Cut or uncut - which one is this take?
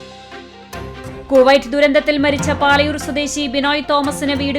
cut